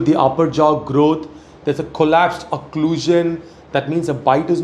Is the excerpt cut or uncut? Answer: uncut